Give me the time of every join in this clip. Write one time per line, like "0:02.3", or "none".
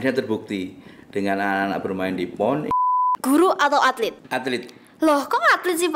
0:02.7
0:04.2